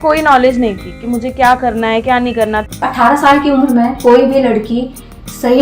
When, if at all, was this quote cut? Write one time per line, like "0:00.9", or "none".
0:02.8